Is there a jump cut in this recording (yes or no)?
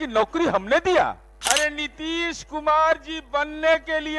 yes